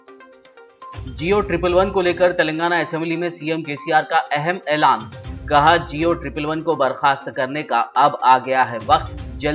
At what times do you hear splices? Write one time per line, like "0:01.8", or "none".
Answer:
none